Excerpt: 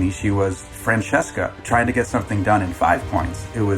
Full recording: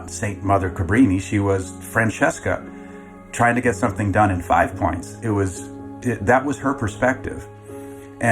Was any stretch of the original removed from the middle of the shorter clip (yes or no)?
yes